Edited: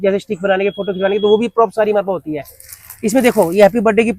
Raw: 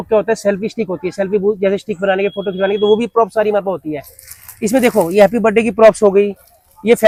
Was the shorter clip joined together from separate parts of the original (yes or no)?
no